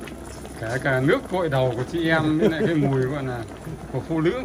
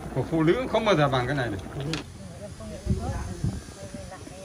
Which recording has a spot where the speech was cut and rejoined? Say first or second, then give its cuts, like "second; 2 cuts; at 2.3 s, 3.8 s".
second; 1 cut; at 2.1 s